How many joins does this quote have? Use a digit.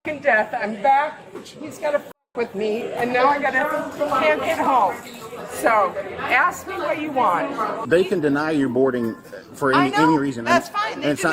1